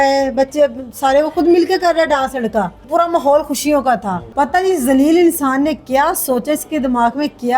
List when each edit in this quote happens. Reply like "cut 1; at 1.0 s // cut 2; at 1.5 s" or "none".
cut 1; at 2.8 s // cut 2; at 4.2 s